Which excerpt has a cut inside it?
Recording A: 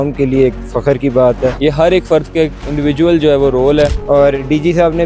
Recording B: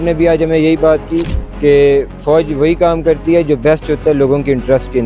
A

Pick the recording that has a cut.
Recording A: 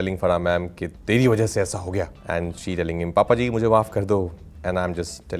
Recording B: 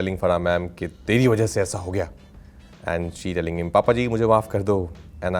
A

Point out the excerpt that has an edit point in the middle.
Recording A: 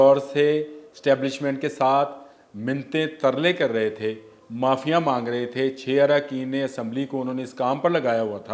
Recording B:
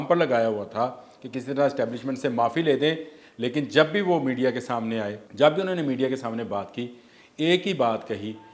B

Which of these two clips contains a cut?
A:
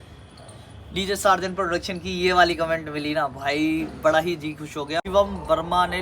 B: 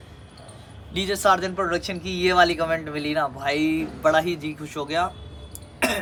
A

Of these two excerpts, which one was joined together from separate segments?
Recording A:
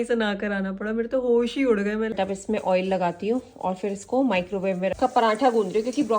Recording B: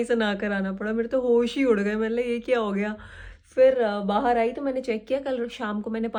A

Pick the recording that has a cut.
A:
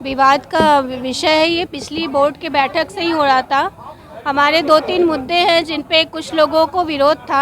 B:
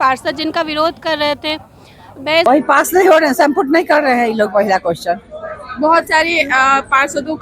B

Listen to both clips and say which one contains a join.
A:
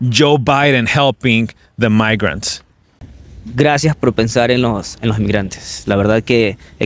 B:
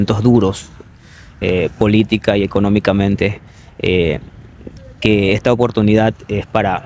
A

